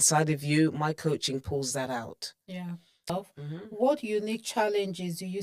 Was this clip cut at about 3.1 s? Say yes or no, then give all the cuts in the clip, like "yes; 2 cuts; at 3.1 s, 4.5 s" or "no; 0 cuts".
yes; 1 cut; at 3.1 s